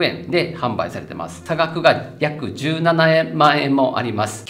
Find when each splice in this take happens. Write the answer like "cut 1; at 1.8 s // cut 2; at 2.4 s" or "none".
cut 1; at 1.3 s